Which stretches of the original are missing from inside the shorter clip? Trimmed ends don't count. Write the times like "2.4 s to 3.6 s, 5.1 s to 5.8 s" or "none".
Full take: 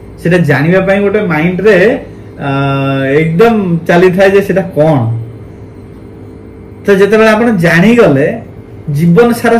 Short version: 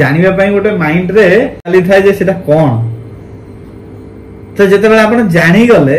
2.2 s to 4.0 s